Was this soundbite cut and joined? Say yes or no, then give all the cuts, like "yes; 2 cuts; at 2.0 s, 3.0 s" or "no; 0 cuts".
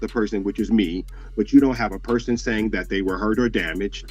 no; 0 cuts